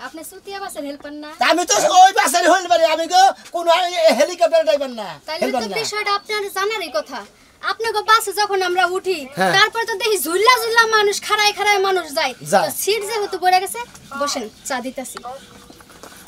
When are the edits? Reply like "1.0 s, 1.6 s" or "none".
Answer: none